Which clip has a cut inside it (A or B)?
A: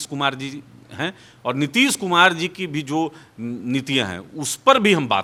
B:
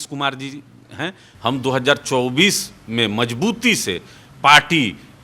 B